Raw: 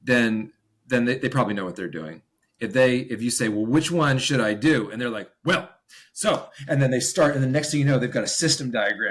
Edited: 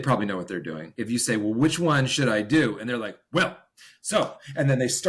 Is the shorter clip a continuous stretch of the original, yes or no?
no